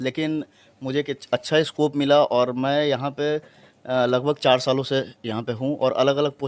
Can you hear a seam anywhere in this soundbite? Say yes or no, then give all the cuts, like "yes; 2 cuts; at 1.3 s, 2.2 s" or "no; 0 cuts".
no; 0 cuts